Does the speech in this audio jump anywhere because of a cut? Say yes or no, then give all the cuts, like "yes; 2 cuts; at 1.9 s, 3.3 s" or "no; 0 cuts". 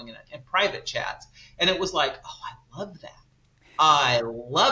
no; 0 cuts